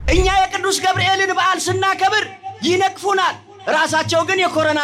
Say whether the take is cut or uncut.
uncut